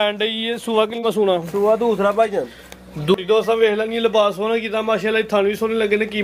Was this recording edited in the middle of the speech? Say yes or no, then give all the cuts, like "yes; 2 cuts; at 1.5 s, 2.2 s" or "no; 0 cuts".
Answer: yes; 1 cut; at 3.1 s